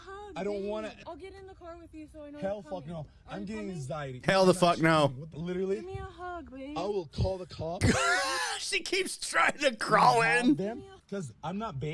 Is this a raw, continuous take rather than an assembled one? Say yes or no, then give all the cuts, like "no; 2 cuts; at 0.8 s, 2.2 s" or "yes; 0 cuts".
no; 3 cuts; at 1.0 s, 5.3 s, 10.9 s